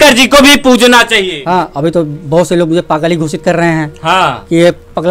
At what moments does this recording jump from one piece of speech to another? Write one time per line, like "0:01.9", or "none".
0:01.3